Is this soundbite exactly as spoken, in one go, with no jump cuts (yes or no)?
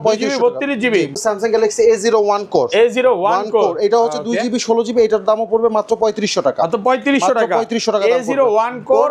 no